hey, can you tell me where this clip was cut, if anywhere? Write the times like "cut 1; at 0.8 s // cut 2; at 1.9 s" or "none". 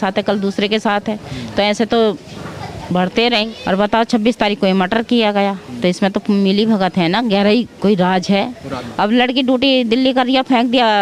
cut 1; at 3.4 s // cut 2; at 8.7 s